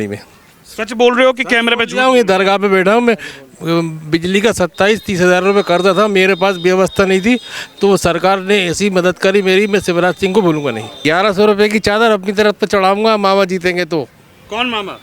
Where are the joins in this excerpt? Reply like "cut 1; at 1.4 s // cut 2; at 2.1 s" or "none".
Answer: cut 1; at 10.9 s